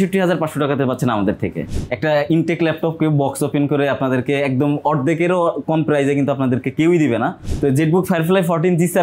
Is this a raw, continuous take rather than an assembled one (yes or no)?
no